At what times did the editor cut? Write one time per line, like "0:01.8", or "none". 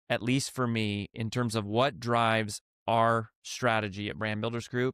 none